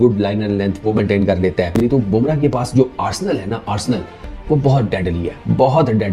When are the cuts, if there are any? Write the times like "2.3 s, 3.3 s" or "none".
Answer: 1.8 s